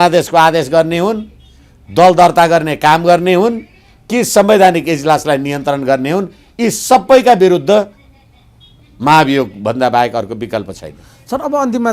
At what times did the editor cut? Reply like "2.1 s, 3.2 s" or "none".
none